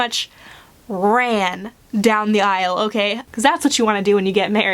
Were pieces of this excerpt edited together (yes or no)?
yes